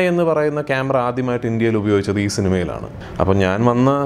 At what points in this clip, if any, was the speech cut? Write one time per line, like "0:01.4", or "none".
0:02.9